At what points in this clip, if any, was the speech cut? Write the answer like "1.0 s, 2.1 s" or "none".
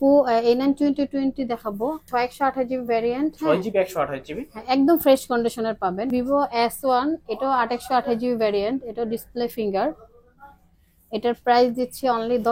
2.0 s, 6.1 s